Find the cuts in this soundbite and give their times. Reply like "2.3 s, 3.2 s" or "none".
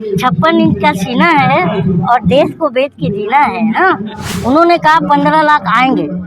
4.3 s